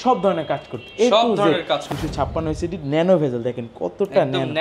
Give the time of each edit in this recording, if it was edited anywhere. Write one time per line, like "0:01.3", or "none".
0:01.8